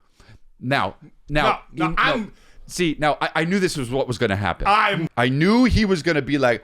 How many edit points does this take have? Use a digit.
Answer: 1